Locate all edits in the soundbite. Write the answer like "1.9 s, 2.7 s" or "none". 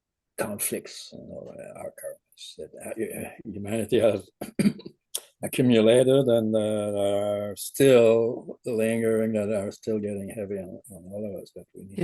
none